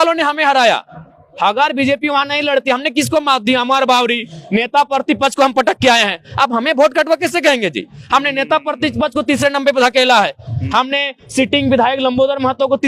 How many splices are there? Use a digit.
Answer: 0